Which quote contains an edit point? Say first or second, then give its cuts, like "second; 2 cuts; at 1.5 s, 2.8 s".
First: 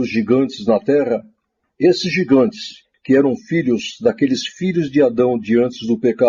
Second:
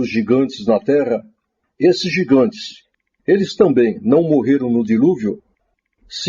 second; 1 cut; at 2.9 s